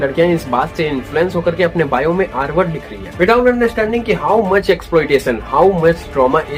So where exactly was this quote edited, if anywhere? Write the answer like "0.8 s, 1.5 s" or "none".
none